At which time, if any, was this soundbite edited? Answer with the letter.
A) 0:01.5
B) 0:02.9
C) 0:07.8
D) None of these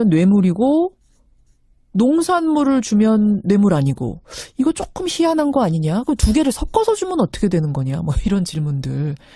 B